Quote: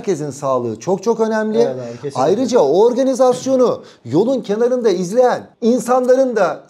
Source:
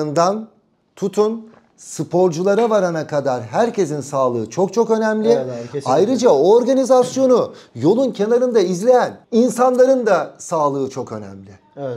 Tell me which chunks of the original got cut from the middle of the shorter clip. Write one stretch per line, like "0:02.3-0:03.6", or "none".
none